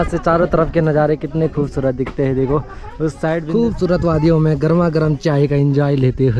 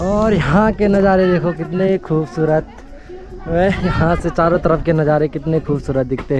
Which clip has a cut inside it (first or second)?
first